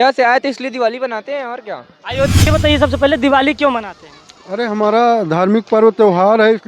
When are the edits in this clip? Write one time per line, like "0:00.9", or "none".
0:02.5